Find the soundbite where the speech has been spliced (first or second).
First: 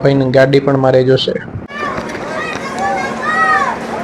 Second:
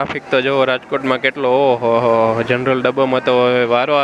first